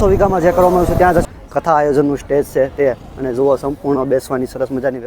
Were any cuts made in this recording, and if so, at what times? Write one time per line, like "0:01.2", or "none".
0:01.3

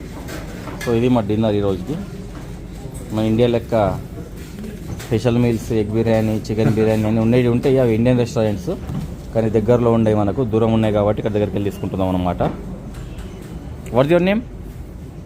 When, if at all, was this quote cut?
0:13.4

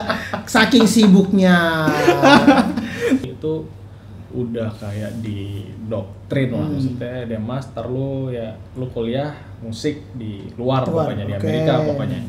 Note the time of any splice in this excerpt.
0:03.2

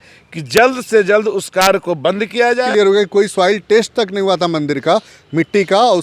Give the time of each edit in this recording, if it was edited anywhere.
0:02.7

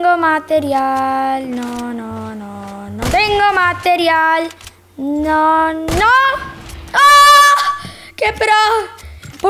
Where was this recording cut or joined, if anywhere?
none

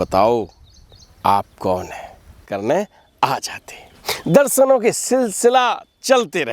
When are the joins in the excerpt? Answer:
0:02.4

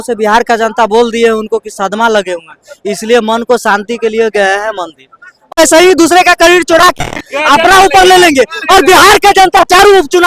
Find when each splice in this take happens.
0:05.5

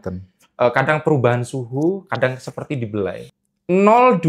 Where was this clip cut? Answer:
0:03.2

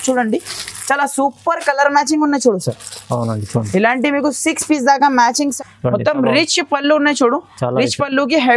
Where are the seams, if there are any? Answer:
0:05.5

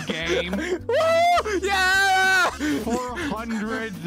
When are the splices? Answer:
0:02.6

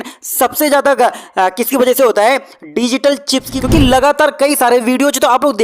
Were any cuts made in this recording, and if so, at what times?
0:03.5

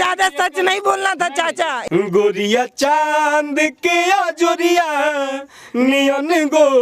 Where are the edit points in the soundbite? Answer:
0:01.8

